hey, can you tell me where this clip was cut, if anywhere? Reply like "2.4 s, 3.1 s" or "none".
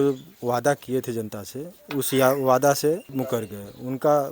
3.1 s